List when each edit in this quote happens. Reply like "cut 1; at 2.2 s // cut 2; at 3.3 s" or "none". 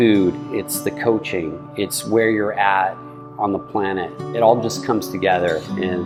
none